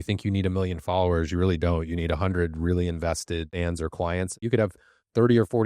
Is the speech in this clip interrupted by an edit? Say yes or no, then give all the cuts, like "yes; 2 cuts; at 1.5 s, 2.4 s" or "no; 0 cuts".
yes; 2 cuts; at 3.5 s, 4.4 s